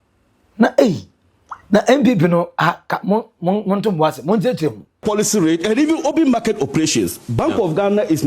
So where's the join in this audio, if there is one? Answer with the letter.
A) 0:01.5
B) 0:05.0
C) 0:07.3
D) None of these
B